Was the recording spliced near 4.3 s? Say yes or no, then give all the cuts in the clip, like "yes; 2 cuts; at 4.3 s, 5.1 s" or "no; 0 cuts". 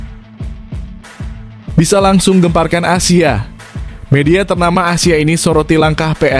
no; 1 cut; at 1.7 s